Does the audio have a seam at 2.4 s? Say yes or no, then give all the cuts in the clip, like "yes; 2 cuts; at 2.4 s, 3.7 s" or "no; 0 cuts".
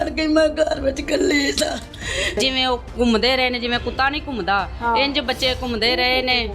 yes; 1 cut; at 2.4 s